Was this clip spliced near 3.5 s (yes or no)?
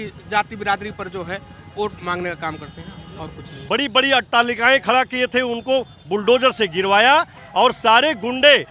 yes